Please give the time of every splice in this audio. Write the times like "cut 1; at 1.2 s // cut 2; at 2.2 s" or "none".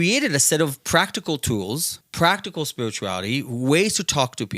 cut 1; at 2.0 s